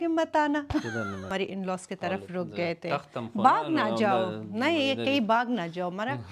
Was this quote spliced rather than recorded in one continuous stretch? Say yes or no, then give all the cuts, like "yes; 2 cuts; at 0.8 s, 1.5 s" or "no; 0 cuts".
yes; 1 cut; at 1.3 s